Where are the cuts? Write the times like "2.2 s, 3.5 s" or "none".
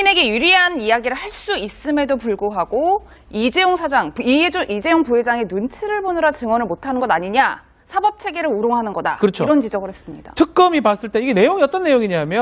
11.4 s